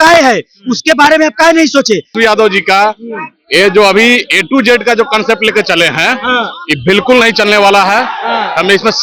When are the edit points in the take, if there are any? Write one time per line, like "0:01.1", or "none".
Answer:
0:02.1